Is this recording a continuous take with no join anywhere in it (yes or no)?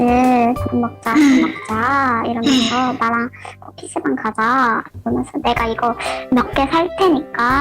yes